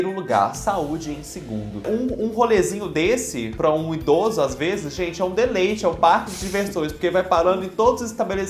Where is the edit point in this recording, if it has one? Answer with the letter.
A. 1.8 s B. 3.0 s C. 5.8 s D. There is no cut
A